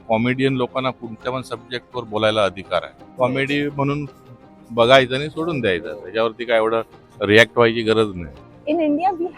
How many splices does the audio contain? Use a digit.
2